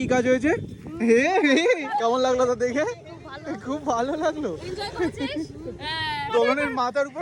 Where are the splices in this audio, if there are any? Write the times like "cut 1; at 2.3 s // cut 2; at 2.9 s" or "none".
cut 1; at 1.9 s // cut 2; at 6.2 s